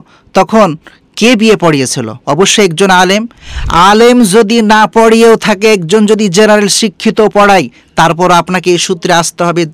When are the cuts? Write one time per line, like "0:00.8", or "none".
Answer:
none